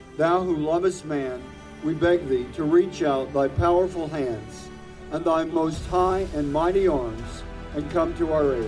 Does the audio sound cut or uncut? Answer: cut